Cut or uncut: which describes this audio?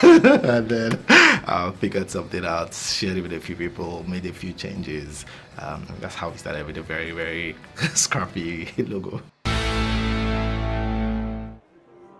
cut